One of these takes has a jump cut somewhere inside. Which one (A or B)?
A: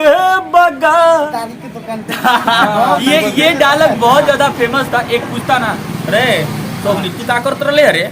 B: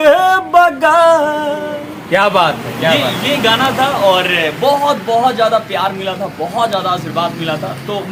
A